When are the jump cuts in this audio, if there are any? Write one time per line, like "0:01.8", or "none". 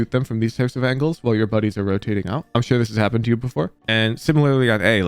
0:02.4

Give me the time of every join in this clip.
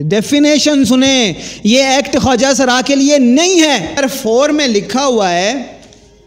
0:04.0

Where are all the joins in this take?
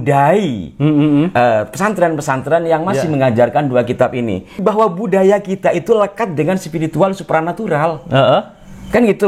0:04.5

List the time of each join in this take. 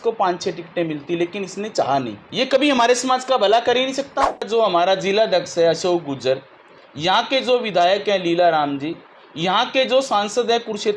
0:02.2
0:04.5

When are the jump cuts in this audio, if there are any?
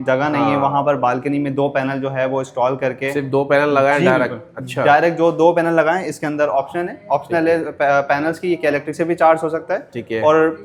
none

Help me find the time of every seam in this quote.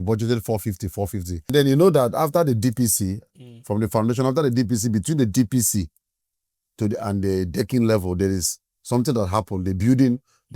0:01.5

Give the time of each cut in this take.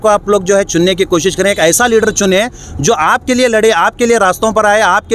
none

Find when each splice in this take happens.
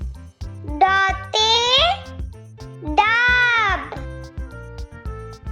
0:04.0

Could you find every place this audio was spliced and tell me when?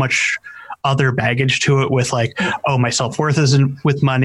none

